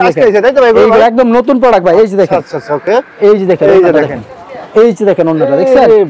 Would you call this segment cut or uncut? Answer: uncut